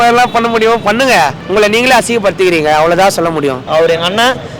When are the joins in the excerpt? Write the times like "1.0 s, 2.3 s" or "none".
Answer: 1.4 s, 3.7 s